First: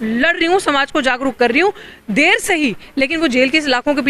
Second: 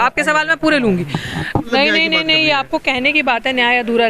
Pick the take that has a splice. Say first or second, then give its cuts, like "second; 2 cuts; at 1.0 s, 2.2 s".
second; 1 cut; at 1.7 s